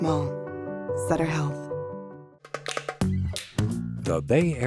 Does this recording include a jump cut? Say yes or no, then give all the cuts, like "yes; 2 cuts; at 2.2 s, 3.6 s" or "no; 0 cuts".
yes; 1 cut; at 2.2 s